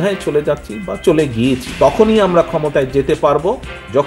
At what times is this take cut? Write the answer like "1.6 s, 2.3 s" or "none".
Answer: 1.7 s